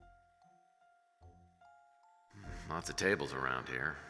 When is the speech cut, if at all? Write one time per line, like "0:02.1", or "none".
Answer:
0:02.4